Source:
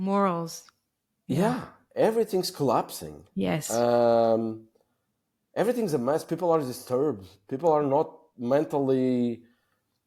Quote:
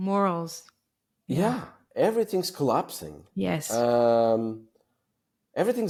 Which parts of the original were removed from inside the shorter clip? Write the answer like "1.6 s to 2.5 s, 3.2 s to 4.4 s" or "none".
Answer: none

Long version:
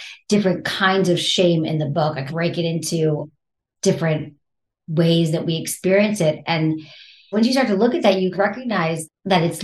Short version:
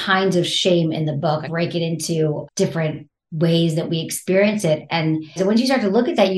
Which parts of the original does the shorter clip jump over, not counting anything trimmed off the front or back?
2.2 s to 2.3 s, 3.6 s to 4.4 s, 6.9 s to 7.2 s

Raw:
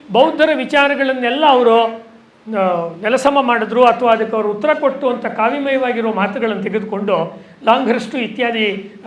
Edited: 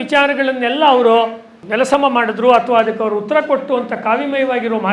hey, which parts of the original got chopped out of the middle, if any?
2.2 s to 2.9 s

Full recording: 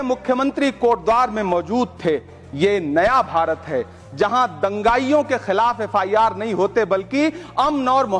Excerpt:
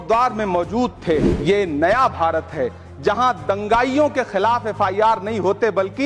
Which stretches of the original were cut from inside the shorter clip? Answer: 2.3 s to 2.5 s

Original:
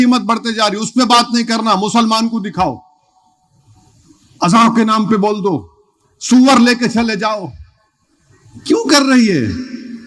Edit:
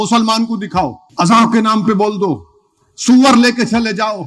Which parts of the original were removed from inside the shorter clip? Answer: 2.8 s to 4.2 s

